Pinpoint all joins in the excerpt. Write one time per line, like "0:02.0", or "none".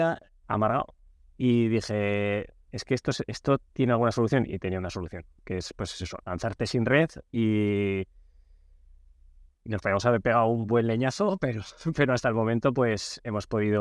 none